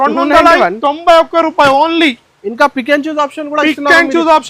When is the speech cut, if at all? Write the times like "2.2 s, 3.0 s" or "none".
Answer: none